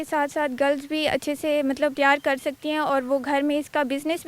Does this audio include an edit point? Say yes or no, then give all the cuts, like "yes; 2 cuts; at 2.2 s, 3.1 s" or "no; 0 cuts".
yes; 1 cut; at 1.9 s